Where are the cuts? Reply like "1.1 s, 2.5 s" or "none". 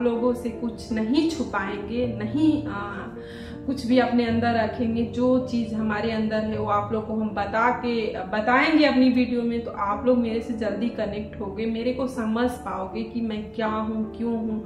none